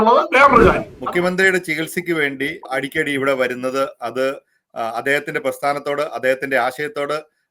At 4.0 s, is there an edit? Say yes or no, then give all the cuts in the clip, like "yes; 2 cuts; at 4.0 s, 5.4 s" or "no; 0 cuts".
no; 2 cuts; at 0.9 s, 2.7 s